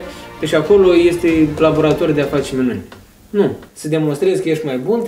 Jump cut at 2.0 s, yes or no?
no